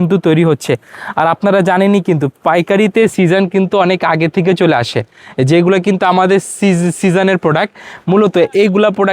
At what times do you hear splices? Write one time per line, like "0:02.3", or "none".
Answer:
none

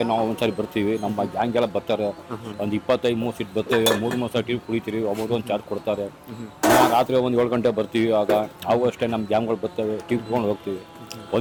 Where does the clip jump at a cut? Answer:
none

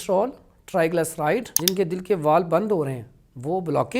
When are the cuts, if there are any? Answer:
0:01.5

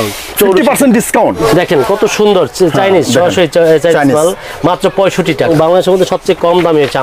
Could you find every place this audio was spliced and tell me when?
0:01.4
0:05.5

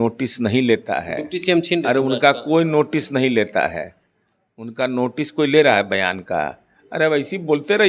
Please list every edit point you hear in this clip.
none

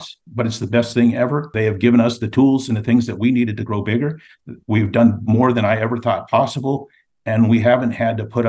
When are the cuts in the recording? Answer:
0:01.5

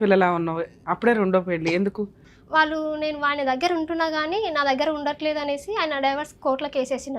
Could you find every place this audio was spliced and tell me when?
0:02.2

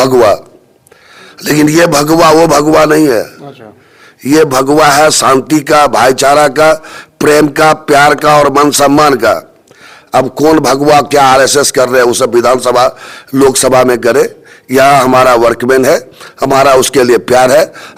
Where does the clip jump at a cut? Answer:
none

